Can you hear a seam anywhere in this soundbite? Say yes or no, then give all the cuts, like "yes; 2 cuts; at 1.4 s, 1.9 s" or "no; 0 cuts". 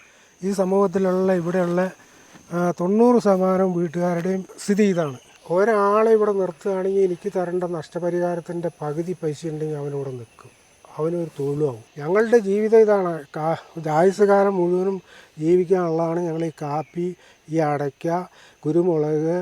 yes; 3 cuts; at 4.5 s, 5.3 s, 11.9 s